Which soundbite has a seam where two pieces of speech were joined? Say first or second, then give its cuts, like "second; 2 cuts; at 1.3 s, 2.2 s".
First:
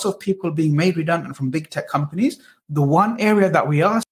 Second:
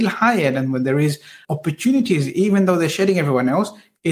second; 1 cut; at 1.4 s